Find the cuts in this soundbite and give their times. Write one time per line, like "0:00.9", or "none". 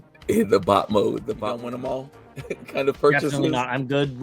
0:01.3